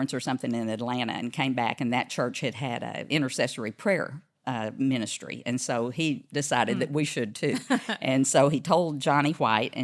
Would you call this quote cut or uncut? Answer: cut